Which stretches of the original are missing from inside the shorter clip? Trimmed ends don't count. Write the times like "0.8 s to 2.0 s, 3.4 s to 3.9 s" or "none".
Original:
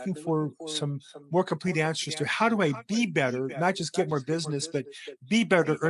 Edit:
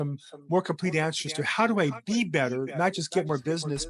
none